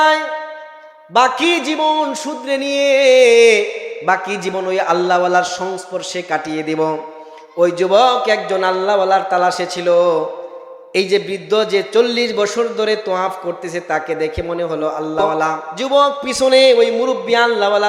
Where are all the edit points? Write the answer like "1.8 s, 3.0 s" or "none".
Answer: 15.7 s